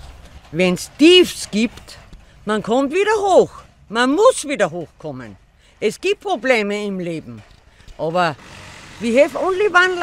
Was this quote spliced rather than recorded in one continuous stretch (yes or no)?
no